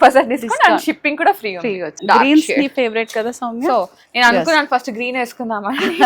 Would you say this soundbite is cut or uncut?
cut